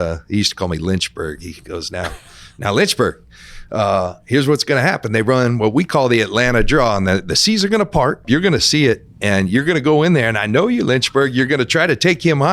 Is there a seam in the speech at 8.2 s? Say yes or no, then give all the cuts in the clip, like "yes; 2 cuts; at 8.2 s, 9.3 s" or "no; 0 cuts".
yes; 1 cut; at 8.2 s